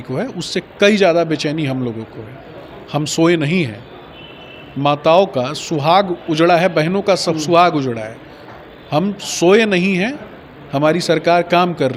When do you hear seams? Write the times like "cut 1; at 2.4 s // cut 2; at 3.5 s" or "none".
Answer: none